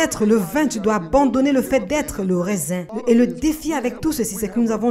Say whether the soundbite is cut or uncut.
cut